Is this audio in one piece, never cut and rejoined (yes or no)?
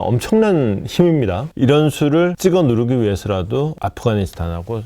no